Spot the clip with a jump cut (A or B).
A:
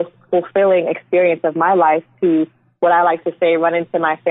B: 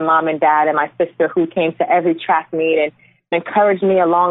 B